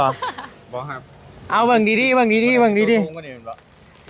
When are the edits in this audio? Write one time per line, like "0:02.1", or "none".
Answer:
none